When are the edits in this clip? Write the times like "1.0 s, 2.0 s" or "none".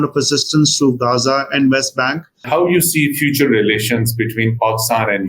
2.4 s